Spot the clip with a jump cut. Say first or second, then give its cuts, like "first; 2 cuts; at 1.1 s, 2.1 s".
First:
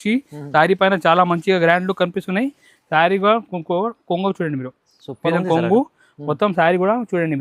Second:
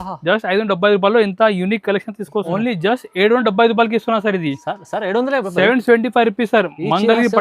second; 1 cut; at 2.5 s